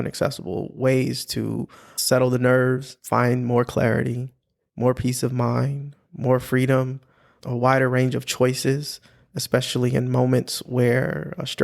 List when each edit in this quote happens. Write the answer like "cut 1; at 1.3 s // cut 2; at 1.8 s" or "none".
cut 1; at 2.9 s